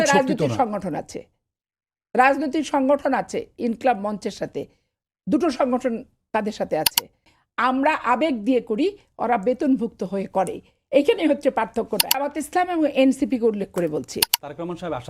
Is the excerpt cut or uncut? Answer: cut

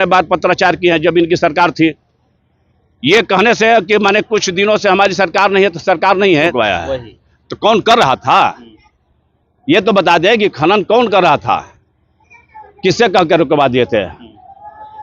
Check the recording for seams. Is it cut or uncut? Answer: cut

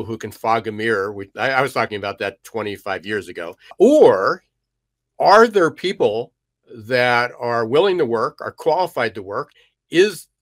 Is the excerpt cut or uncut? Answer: cut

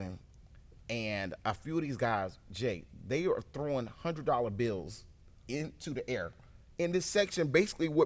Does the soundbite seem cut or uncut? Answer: uncut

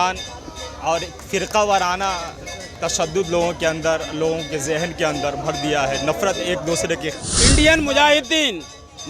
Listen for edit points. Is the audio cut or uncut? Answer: cut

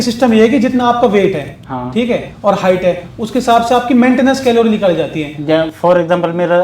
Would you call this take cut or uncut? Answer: uncut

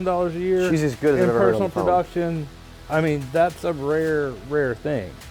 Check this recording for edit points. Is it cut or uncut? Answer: uncut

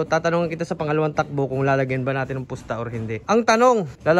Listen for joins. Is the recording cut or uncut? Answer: cut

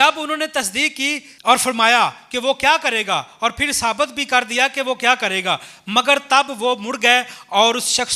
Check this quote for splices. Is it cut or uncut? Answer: cut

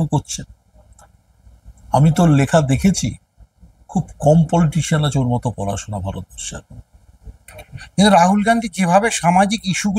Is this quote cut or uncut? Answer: uncut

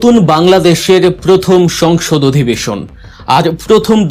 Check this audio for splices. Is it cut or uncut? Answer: uncut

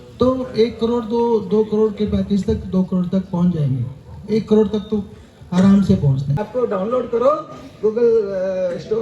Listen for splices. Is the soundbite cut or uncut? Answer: cut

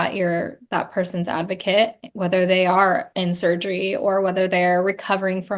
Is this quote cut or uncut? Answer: uncut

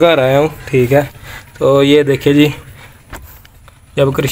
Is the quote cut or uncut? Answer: uncut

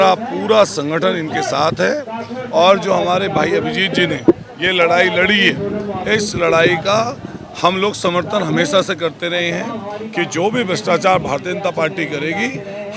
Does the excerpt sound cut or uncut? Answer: uncut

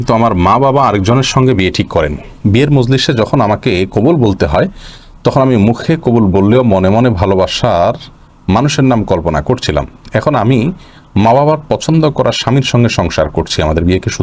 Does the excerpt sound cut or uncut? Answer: uncut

